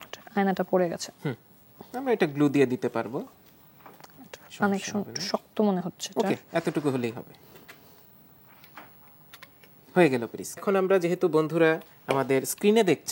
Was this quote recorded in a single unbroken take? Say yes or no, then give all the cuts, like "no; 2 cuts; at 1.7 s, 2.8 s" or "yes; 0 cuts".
no; 1 cut; at 10.6 s